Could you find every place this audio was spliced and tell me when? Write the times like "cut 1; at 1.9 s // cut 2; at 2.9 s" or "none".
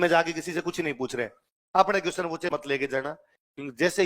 cut 1; at 2.6 s